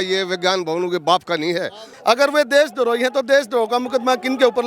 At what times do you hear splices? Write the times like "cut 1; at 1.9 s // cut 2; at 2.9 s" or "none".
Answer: cut 1; at 1.8 s